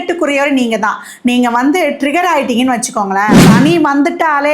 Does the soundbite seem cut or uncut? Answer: cut